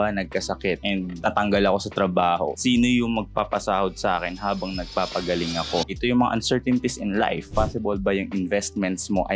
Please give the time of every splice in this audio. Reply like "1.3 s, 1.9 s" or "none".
2.6 s, 5.9 s, 7.5 s